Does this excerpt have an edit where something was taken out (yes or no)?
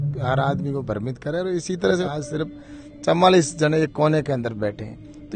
yes